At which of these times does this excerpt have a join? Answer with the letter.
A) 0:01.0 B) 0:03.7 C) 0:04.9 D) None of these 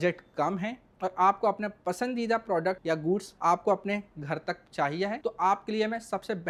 D